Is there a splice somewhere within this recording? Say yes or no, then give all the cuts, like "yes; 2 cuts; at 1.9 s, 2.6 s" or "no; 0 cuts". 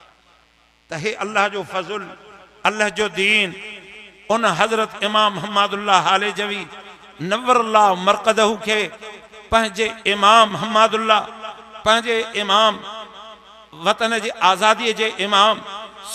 no; 0 cuts